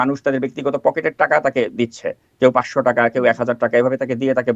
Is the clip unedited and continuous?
yes; 0 cuts

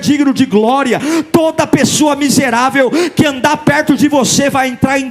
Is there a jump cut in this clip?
yes; 1 cut; at 1.0 s

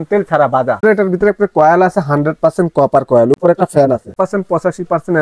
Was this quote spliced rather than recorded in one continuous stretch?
yes; 2 cuts; at 0.8 s, 4.1 s

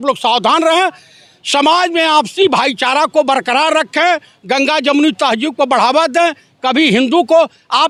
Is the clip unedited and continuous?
yes; 0 cuts

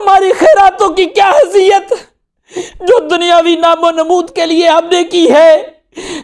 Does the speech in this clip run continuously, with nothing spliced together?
yes; 0 cuts

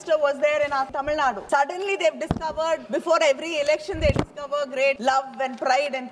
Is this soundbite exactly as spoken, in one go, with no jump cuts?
no; 3 cuts; at 0.9 s, 2.8 s, 5.0 s

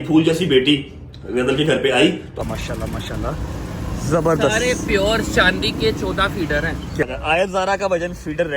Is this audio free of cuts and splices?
no; 2 cuts; at 2.4 s, 7.0 s

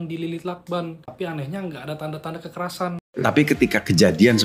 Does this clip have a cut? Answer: yes; 1 cut; at 3.0 s

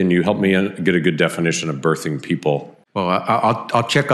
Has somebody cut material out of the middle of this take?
yes; 1 cut; at 2.8 s

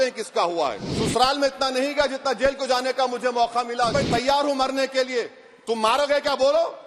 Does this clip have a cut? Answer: yes; 2 cuts; at 0.9 s, 3.9 s

